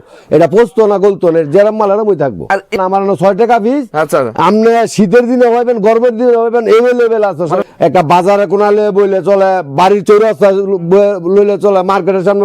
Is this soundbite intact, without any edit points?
no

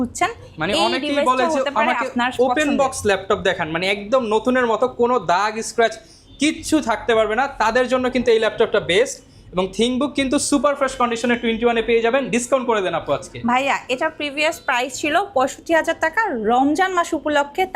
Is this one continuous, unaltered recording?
yes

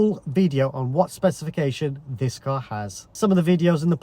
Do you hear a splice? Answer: yes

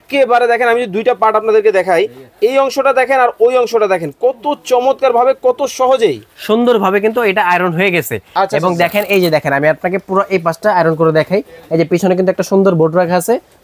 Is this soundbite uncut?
yes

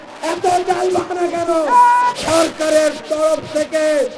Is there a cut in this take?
yes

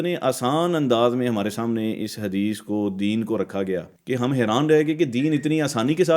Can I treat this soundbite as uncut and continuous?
no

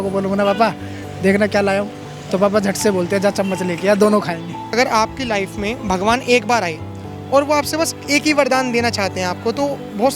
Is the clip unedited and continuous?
no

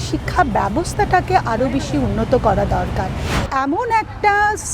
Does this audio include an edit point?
yes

